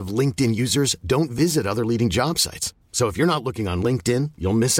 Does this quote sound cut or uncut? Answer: uncut